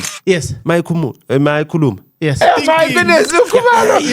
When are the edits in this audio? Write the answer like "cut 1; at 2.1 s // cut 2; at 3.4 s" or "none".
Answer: cut 1; at 2.4 s